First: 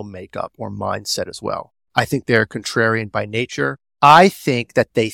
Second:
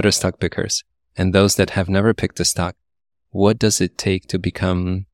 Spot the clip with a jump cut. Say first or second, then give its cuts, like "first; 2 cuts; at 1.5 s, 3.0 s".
first; 1 cut; at 3.8 s